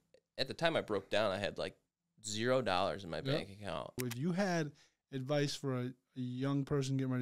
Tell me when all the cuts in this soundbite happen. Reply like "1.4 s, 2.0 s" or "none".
4.0 s